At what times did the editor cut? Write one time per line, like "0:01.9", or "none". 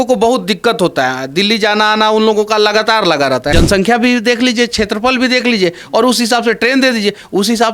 0:03.5